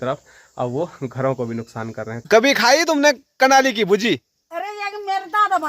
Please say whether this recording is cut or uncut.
cut